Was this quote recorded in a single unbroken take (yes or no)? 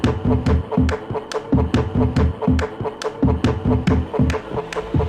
no